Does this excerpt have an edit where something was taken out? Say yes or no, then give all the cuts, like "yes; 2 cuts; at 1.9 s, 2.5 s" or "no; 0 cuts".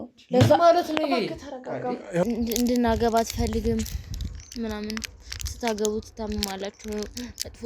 yes; 1 cut; at 2.2 s